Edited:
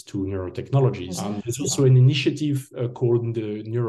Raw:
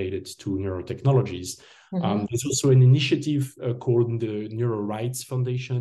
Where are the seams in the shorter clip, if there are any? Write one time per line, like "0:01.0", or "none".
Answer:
0:01.1